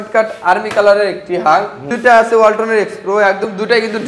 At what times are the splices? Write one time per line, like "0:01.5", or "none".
0:01.9